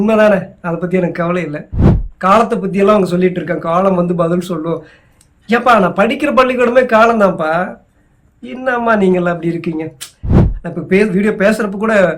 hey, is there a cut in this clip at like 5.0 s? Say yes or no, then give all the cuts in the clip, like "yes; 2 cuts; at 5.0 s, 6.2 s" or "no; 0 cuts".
no; 2 cuts; at 1.9 s, 10.4 s